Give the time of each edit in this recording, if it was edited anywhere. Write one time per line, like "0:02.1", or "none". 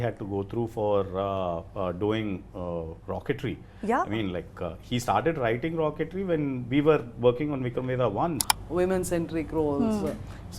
0:08.4